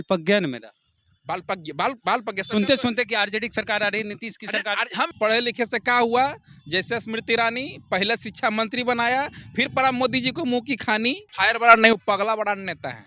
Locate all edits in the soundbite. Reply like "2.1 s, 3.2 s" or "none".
5.1 s, 11.3 s